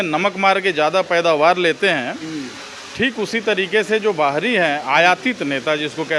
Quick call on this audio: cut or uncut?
uncut